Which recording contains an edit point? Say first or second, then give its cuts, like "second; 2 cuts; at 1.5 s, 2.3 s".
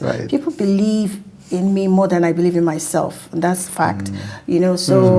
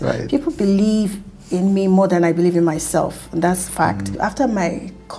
second; 1 cut; at 4.1 s